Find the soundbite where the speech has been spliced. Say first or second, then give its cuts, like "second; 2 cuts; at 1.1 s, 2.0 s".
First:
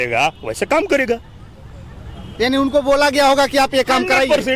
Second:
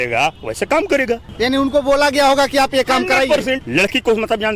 second; 2 cuts; at 1.3 s, 3.6 s